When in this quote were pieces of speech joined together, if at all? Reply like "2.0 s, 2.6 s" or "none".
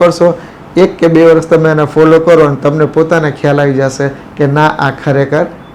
none